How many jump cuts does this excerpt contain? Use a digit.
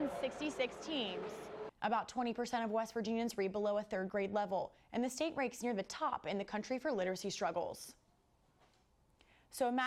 1